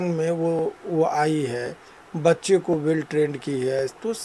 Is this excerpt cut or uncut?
uncut